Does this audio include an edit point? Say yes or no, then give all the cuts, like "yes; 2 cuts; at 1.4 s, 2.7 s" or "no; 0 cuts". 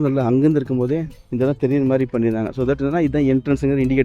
no; 0 cuts